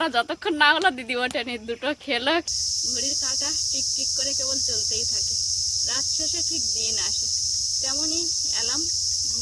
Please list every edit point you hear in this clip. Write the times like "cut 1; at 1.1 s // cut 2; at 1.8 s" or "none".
cut 1; at 2.5 s